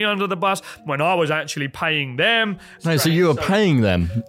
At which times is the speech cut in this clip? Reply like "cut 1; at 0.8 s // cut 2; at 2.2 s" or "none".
cut 1; at 2.7 s